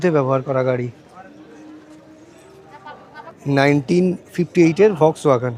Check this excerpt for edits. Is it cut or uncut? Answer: cut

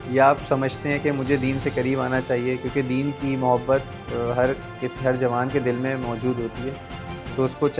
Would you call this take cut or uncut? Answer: uncut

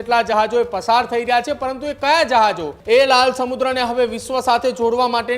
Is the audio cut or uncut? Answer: cut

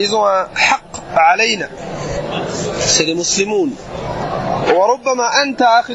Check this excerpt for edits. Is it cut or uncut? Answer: cut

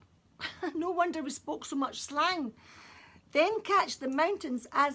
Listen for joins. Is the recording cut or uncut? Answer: uncut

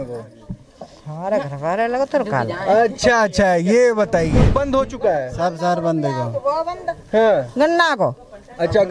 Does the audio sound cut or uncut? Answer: cut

